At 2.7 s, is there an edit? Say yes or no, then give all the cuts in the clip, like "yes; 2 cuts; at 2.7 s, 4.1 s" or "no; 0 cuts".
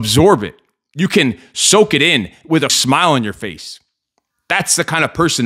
yes; 1 cut; at 2.7 s